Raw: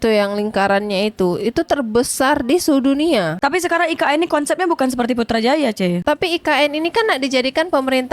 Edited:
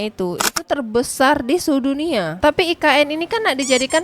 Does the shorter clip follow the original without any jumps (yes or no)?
no